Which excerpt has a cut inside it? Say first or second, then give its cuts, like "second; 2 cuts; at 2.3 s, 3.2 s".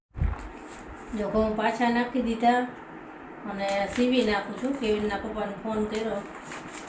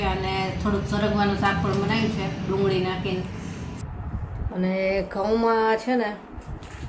second; 1 cut; at 3.8 s